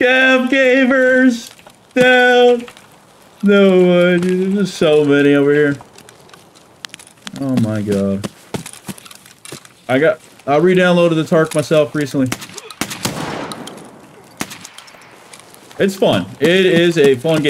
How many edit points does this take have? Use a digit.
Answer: 1